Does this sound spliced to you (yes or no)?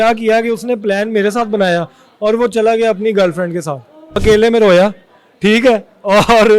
yes